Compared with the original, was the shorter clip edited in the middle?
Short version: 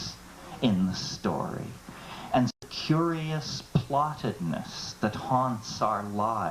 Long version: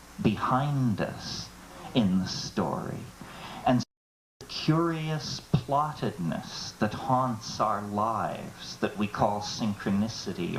yes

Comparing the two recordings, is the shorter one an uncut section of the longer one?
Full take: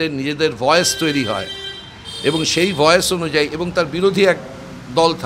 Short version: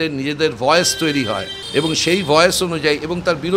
no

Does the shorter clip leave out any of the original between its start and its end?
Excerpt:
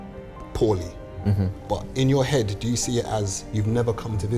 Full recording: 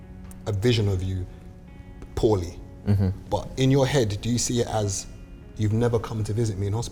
yes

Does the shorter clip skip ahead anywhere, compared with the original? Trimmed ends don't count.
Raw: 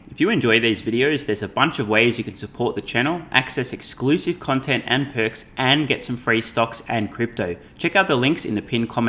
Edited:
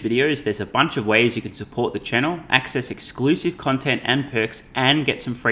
no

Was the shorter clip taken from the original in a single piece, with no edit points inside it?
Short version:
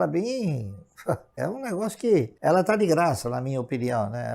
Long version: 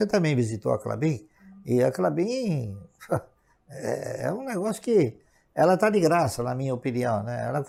no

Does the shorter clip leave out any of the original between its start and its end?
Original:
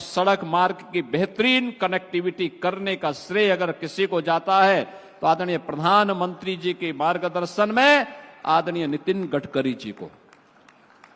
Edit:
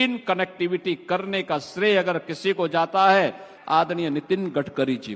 yes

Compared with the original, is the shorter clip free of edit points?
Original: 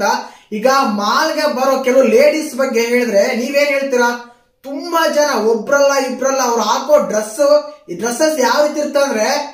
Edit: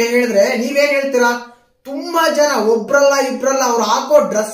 yes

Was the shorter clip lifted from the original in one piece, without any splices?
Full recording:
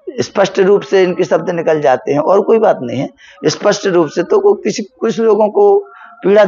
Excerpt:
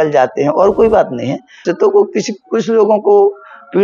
no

